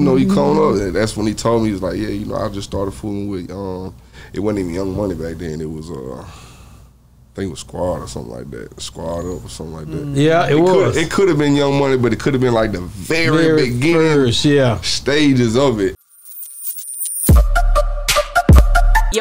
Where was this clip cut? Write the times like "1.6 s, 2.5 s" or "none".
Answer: 16.0 s

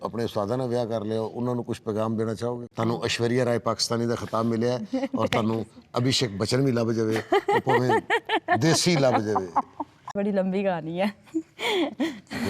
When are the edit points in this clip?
2.6 s, 9.7 s

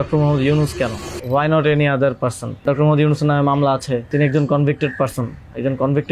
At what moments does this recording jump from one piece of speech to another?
1.1 s, 2.6 s, 4.1 s

